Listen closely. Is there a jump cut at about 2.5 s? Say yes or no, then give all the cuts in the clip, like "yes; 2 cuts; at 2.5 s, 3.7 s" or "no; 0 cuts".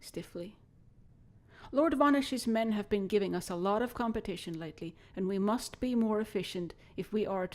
yes; 1 cut; at 2.5 s